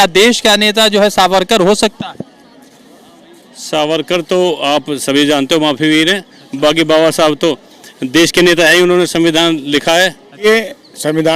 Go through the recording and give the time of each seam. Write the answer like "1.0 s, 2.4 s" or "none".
10.4 s